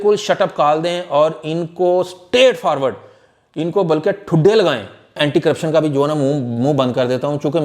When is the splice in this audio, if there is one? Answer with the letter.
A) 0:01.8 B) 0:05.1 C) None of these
B